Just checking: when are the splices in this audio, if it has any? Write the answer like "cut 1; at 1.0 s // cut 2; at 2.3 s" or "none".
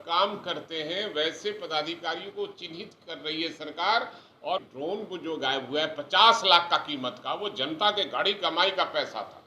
cut 1; at 4.6 s